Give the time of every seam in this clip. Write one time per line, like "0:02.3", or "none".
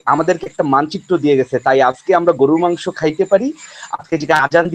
none